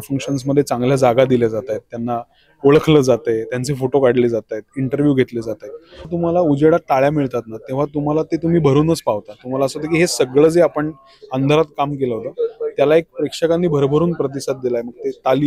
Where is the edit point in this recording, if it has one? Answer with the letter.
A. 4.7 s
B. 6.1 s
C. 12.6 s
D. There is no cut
B